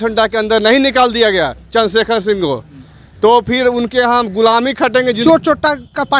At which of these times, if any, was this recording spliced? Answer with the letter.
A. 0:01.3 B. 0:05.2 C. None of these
B